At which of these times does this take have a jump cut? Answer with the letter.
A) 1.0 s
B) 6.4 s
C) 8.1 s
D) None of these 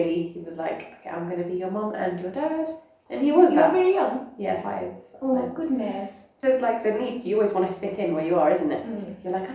B